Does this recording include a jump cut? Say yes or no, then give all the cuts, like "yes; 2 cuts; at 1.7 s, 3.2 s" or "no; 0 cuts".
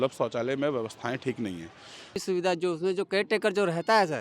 yes; 1 cut; at 2.2 s